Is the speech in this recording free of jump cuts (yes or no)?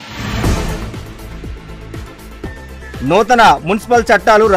no